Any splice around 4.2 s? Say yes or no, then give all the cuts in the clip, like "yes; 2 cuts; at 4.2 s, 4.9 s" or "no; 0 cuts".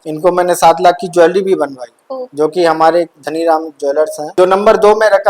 yes; 1 cut; at 4.2 s